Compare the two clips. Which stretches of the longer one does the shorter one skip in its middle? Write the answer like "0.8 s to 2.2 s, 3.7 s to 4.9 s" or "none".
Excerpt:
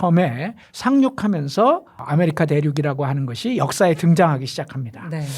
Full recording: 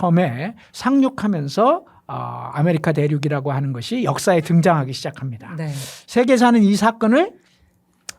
2.0 s to 2.4 s